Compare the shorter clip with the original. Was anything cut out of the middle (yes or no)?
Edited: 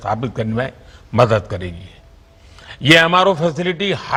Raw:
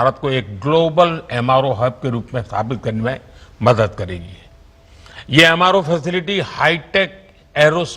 no